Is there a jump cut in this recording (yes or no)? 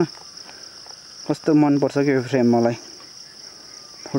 no